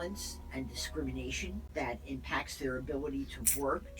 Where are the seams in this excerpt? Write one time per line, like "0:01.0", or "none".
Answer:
0:01.7